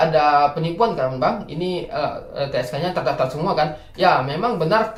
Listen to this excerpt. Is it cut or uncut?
uncut